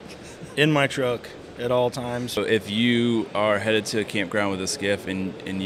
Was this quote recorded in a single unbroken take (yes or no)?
no